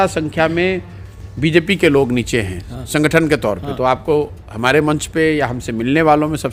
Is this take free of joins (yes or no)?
yes